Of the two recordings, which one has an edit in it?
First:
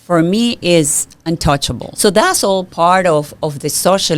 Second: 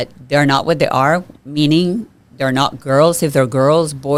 first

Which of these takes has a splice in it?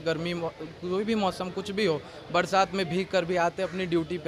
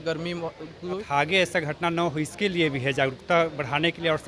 second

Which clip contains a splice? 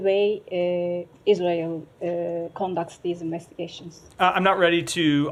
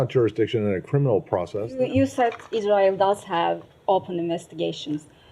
second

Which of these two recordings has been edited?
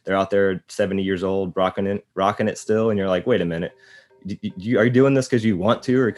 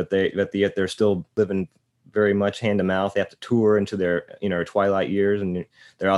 second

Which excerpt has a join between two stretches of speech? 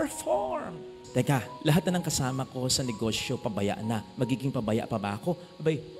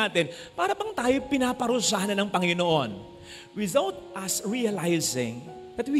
first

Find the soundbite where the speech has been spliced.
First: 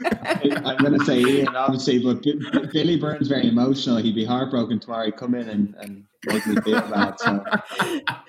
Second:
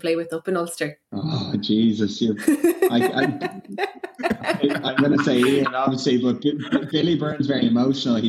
second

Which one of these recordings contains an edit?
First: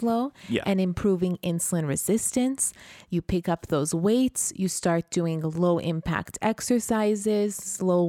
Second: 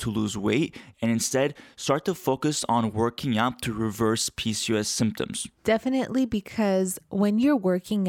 second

